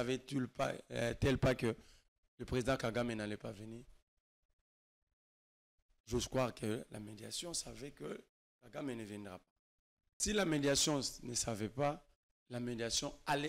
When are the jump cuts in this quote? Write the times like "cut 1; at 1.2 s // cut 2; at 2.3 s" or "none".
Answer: cut 1; at 10.2 s